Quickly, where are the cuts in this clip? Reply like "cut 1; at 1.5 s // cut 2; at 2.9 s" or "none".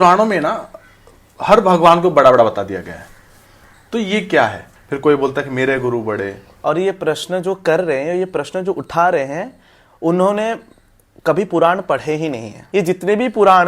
cut 1; at 4.6 s // cut 2; at 6.4 s // cut 3; at 12.5 s